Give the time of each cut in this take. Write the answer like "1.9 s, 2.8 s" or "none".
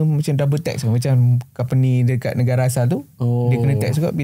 none